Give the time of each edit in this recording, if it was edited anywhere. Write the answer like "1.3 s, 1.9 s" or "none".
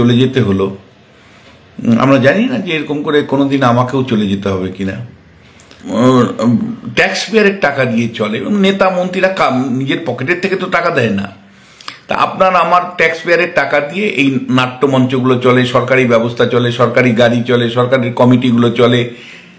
5.8 s

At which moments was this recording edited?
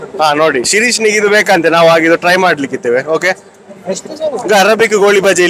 none

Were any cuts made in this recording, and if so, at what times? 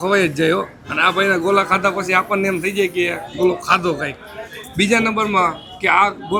none

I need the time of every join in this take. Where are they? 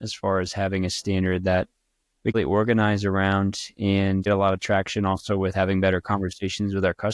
2.4 s, 4.3 s

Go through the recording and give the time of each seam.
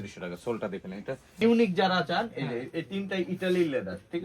1.4 s

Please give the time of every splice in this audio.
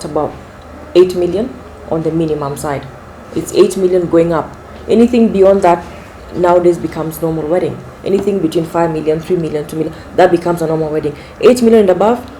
1.6 s

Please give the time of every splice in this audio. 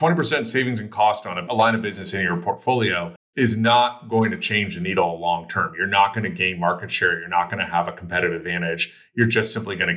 1.5 s

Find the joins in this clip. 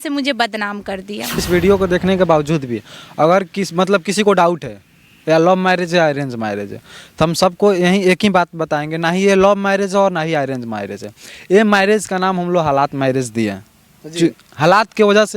1.4 s

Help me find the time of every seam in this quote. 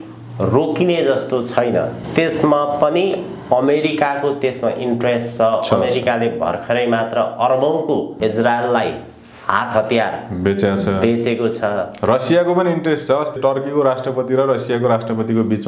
2.0 s, 8.1 s, 13.4 s

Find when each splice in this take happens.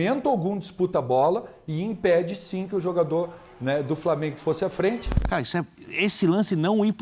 5.1 s

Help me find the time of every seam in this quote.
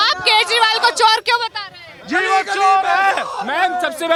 none

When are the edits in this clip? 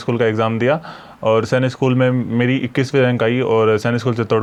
none

